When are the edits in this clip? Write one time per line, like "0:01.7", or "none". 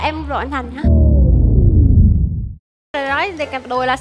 0:02.9